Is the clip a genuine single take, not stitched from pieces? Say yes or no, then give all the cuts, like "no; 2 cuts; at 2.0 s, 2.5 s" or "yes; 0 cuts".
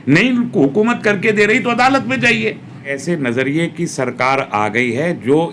no; 1 cut; at 2.9 s